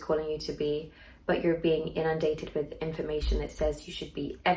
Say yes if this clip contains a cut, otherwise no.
no